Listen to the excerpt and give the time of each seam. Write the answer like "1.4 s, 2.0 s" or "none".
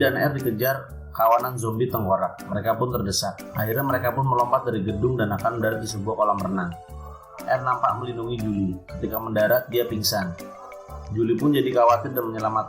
3.5 s